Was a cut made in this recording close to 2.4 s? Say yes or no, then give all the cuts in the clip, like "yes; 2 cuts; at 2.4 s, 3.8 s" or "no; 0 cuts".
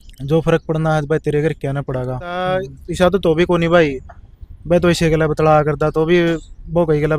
yes; 1 cut; at 2.4 s